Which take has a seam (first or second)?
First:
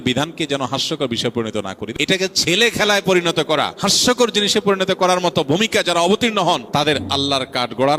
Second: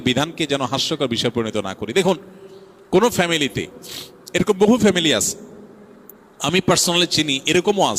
first